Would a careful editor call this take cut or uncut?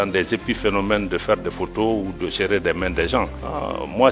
uncut